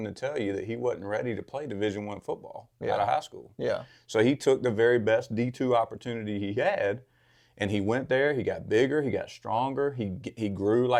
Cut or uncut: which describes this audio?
uncut